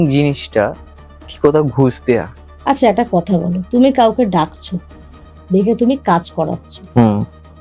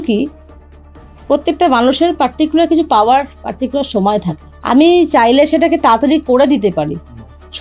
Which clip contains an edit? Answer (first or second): second